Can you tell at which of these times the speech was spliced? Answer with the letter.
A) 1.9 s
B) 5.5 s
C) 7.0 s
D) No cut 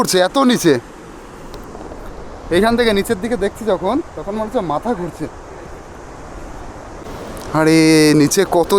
C